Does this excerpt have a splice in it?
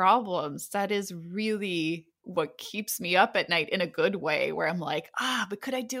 no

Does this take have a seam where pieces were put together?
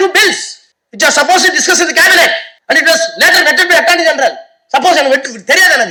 no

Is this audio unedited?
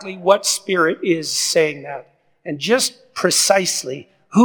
yes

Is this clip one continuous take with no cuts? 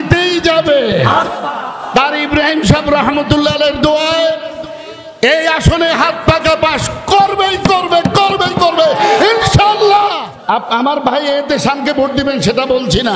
no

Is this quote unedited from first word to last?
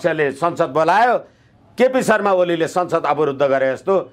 yes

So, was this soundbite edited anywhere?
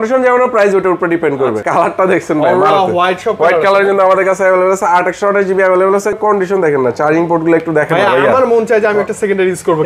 yes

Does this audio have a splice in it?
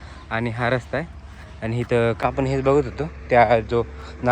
yes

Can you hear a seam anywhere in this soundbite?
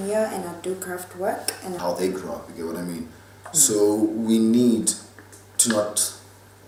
no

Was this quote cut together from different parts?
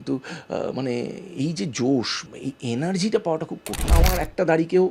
yes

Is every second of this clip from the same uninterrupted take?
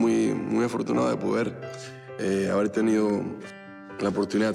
yes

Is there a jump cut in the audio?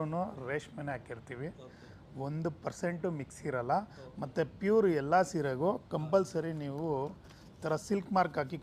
no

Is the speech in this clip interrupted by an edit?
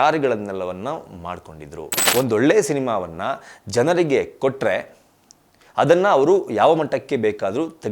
yes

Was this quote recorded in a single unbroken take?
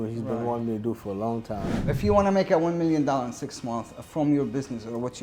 no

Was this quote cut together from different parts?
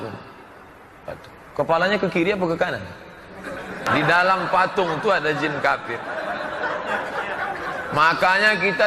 yes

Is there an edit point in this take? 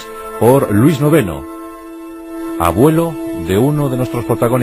no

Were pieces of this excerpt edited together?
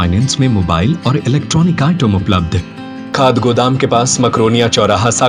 yes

